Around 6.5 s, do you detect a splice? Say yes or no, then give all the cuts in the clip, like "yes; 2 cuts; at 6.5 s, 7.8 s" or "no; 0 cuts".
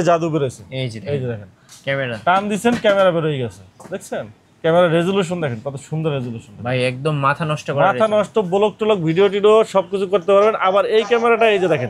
no; 0 cuts